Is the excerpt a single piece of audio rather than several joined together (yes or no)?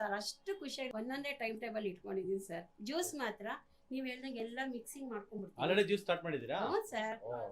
no